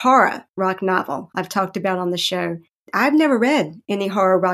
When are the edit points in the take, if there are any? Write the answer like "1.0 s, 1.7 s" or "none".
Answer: 2.9 s